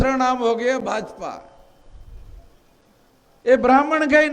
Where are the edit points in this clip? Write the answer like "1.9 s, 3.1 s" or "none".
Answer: none